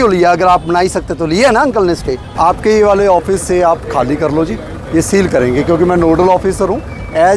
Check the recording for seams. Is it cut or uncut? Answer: cut